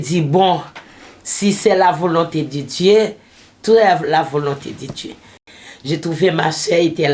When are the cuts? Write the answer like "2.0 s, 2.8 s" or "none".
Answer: 5.5 s